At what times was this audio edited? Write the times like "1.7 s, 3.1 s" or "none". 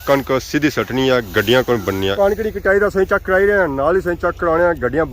2.1 s